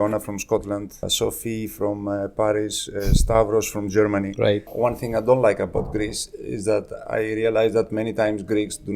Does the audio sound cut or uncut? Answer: cut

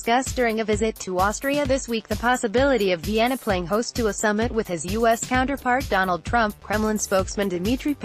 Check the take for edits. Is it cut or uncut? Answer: uncut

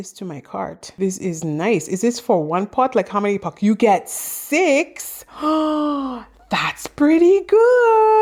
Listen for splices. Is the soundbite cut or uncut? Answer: uncut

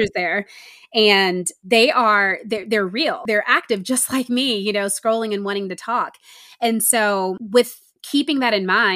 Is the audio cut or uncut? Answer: cut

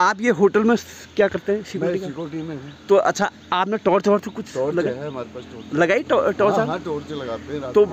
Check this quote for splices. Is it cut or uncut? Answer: uncut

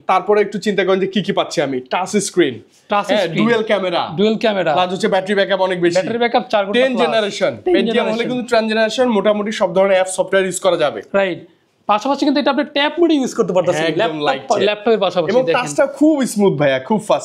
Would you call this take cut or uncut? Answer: uncut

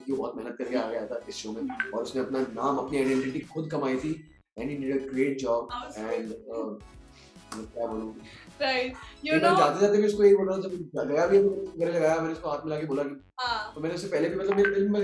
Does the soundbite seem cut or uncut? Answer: uncut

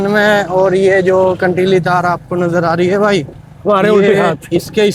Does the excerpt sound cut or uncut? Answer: uncut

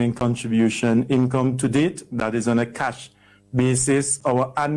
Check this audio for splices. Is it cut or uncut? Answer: uncut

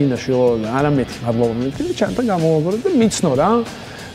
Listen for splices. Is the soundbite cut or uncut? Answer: uncut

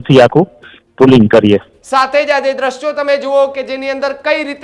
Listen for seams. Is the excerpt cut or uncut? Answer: cut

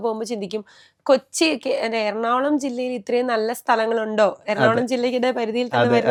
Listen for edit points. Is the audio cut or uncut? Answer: uncut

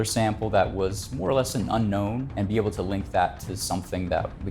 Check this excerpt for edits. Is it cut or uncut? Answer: cut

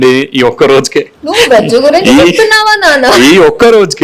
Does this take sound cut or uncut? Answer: cut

